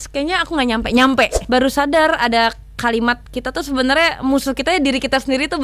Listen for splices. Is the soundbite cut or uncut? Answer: cut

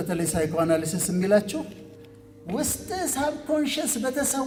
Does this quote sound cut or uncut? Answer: uncut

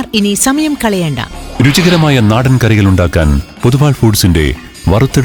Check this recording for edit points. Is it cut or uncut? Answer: uncut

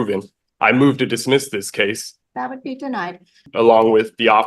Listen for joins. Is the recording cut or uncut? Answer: cut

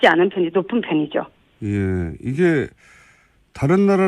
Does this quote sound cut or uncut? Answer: cut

